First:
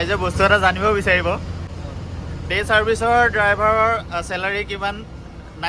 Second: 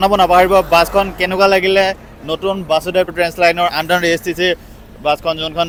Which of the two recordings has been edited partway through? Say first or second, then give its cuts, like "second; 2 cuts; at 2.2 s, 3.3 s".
first; 1 cut; at 1.7 s